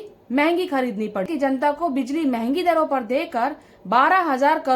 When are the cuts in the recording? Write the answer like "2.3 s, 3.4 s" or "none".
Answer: 1.3 s